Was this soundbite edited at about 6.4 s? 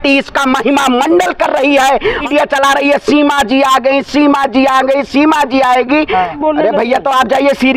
yes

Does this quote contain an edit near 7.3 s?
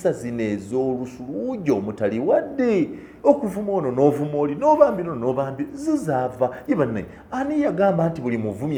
no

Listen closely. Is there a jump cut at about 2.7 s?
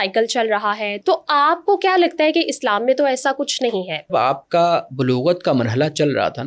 no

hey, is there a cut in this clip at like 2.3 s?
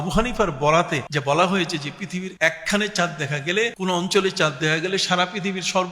yes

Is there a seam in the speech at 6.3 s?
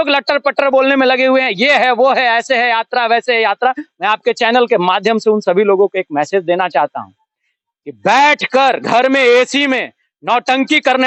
no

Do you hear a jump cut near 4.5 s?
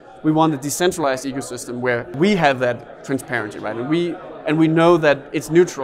no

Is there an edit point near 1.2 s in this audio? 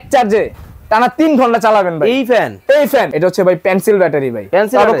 no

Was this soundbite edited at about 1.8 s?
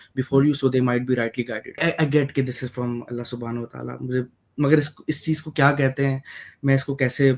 yes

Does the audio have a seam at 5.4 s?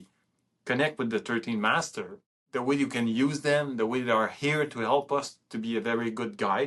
no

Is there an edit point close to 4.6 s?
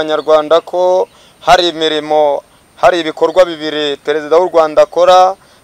no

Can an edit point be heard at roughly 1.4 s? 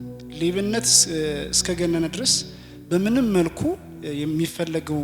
no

